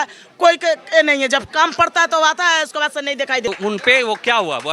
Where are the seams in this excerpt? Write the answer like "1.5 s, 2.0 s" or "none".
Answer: 3.5 s